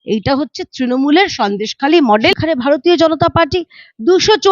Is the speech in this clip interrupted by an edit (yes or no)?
yes